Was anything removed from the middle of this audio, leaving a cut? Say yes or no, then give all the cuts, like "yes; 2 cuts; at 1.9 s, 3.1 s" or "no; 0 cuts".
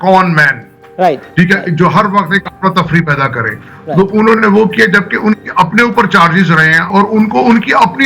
yes; 1 cut; at 6.9 s